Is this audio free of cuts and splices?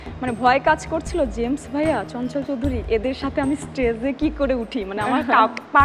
yes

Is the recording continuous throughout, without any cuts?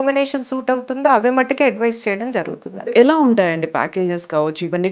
no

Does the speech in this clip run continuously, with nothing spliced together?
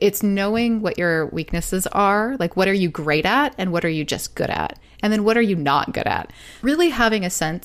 no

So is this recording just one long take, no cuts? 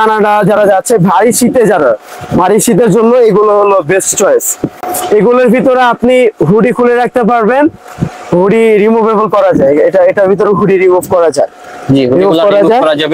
yes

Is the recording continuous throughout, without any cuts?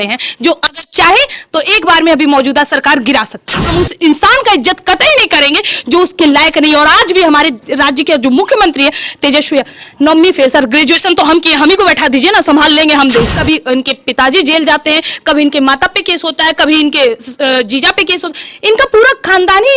no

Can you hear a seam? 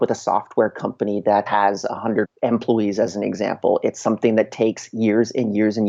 yes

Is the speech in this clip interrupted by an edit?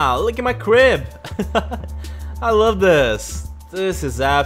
no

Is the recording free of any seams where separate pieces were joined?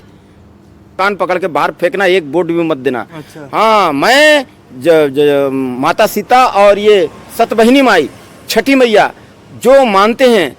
no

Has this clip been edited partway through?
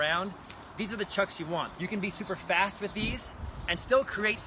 yes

